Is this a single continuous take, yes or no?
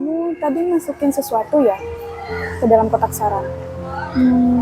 yes